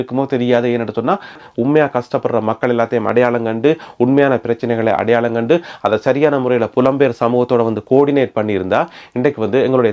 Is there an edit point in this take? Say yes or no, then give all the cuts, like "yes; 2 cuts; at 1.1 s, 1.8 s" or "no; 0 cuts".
yes; 1 cut; at 1.3 s